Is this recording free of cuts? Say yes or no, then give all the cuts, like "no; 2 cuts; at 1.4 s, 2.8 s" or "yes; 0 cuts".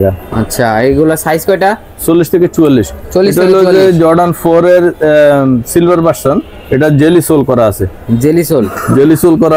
yes; 0 cuts